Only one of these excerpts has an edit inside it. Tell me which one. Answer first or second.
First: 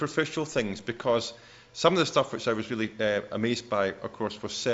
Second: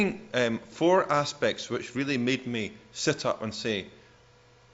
first